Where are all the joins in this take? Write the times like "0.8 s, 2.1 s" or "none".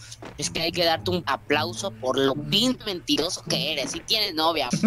1.3 s, 2.5 s